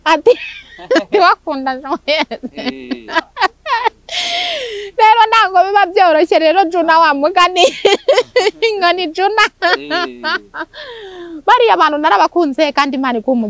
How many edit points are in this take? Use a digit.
0